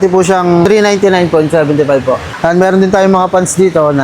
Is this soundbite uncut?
no; 1 cut; at 2.3 s

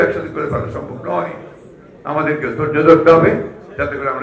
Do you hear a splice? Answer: no; 0 cuts

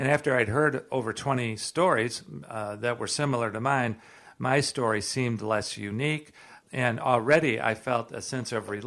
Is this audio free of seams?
no; 1 cut; at 6.6 s

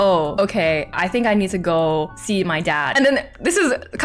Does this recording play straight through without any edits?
no; 1 cut; at 2.9 s

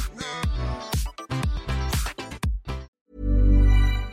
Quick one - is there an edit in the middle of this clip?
yes; 1 cut; at 3.0 s

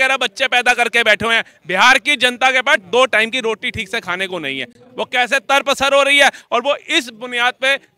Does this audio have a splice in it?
no; 0 cuts

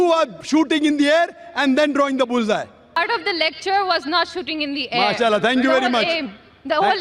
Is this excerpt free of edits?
no; 1 cut; at 3.0 s

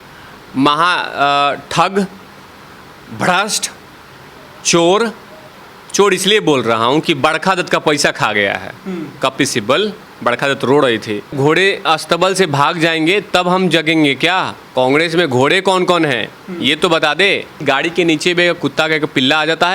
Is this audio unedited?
no; 3 cuts; at 11.3 s, 14.6 s, 17.6 s

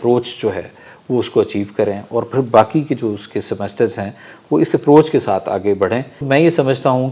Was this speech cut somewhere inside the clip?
yes; 1 cut; at 6.1 s

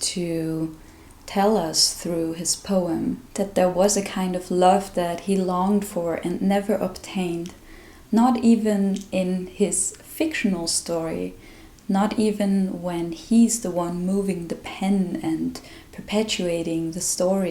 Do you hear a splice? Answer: no; 0 cuts

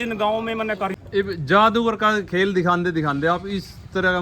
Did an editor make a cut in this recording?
yes; 1 cut; at 0.9 s

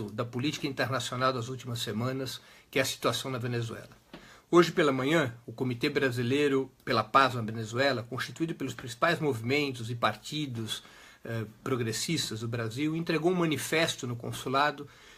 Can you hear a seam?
yes; 1 cut; at 9.3 s

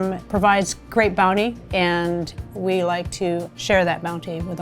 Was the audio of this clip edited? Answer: yes; 2 cuts; at 1.6 s, 2.4 s

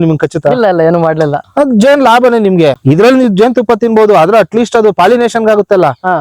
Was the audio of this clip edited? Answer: yes; 2 cuts; at 1.4 s, 2.8 s

